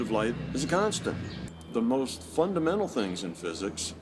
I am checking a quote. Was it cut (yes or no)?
yes